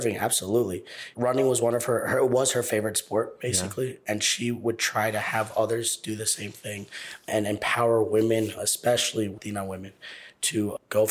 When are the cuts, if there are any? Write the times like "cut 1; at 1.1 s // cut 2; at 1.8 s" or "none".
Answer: cut 1; at 1.1 s // cut 2; at 9.4 s